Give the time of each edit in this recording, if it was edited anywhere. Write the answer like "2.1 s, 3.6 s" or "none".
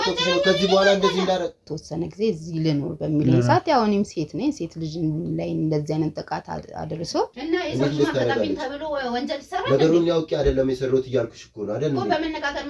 1.7 s, 7.4 s